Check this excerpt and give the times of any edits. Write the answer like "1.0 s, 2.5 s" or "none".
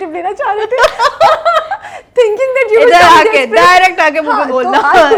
none